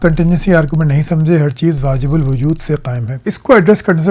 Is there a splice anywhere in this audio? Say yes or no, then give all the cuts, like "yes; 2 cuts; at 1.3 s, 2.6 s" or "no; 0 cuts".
no; 0 cuts